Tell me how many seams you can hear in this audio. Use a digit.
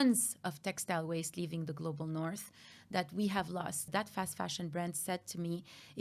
1